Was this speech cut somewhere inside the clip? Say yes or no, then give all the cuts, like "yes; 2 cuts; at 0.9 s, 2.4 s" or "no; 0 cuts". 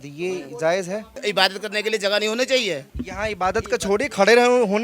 yes; 2 cuts; at 1.2 s, 3.0 s